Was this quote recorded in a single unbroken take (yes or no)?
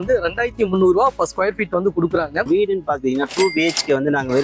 no